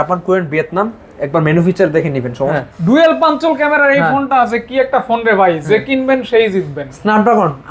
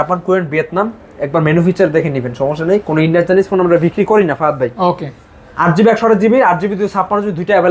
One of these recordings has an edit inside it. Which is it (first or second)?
first